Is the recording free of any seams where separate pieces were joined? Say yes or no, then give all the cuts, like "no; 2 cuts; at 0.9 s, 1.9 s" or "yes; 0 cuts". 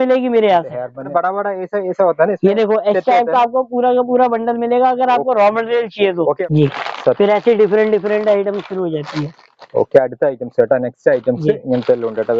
no; 2 cuts; at 1.1 s, 6.4 s